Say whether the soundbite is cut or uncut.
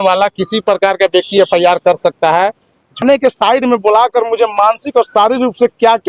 cut